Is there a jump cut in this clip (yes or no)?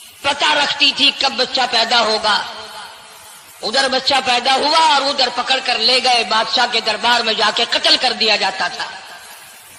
no